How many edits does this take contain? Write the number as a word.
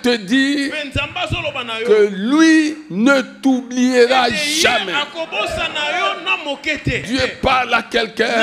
one